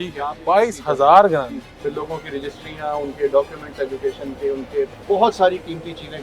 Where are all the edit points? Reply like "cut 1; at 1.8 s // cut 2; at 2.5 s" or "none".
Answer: cut 1; at 1.7 s // cut 2; at 5.0 s